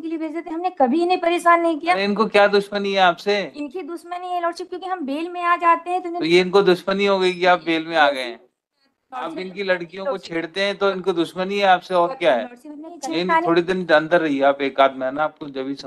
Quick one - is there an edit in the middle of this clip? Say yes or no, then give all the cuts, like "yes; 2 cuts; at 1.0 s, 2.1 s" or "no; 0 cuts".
yes; 3 cuts; at 2.1 s, 9.4 s, 12.9 s